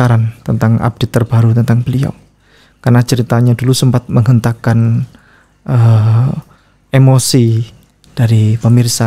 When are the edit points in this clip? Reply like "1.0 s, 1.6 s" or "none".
none